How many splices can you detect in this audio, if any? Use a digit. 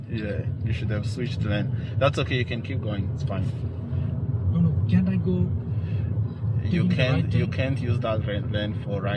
0